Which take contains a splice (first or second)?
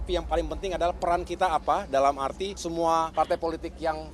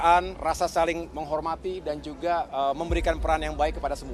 first